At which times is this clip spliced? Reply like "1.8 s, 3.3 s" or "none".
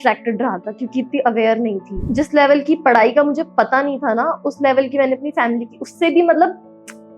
2.0 s

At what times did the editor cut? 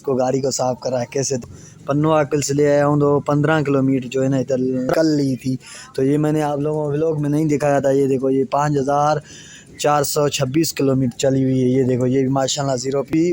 1.5 s, 4.9 s

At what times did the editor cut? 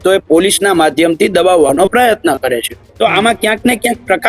2.8 s

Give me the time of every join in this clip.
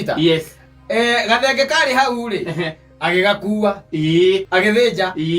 4.5 s

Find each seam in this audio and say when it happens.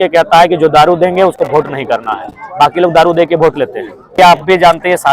4.2 s

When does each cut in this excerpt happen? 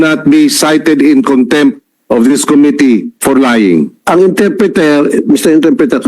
4.0 s

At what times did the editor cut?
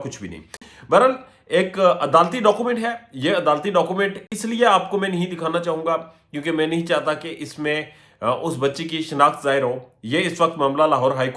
none

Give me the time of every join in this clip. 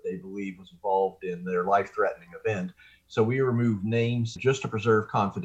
4.4 s

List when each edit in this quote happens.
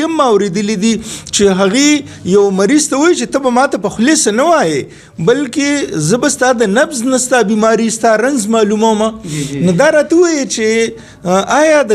none

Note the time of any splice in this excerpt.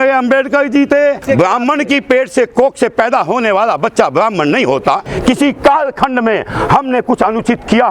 1.2 s, 5.1 s

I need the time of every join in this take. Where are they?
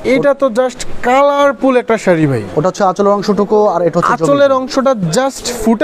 none

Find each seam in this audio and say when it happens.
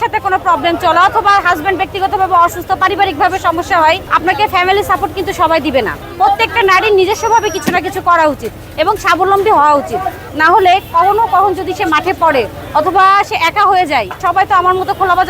4.1 s, 6.0 s, 10.3 s, 14.1 s

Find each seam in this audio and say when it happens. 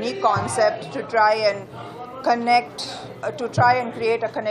none

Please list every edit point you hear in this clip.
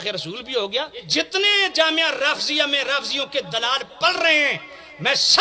1.1 s

